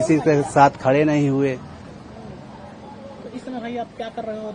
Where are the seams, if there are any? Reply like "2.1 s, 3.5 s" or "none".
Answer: none